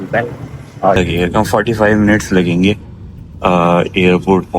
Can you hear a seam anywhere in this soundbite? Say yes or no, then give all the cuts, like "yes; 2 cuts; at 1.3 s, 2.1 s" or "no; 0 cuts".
yes; 1 cut; at 1.0 s